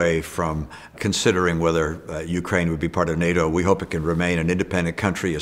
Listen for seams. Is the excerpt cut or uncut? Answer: cut